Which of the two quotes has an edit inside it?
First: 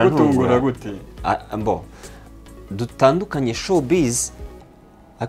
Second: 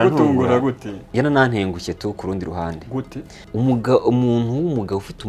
second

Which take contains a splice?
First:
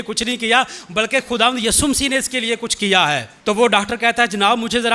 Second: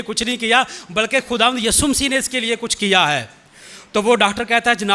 first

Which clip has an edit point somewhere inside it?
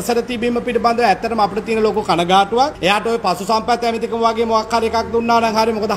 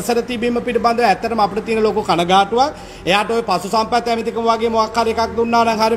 first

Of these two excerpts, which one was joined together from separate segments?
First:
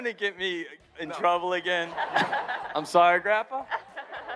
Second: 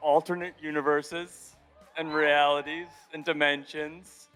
first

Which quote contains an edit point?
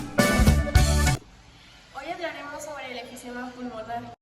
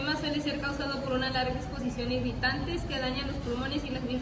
first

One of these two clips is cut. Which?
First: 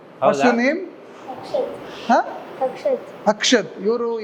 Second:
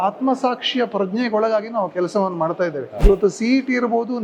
second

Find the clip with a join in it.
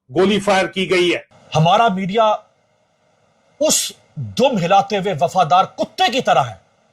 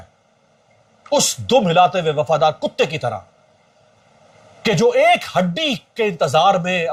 first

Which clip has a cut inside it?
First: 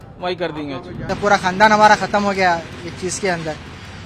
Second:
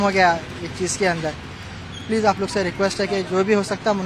first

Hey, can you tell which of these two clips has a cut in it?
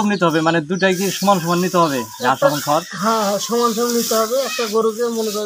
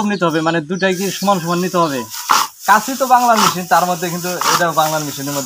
second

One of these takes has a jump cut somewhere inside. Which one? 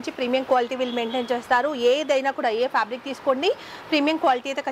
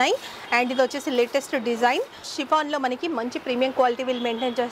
second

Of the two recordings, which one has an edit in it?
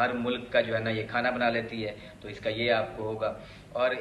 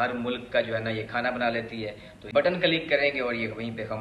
second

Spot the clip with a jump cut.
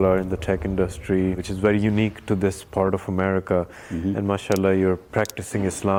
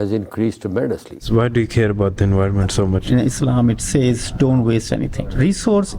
second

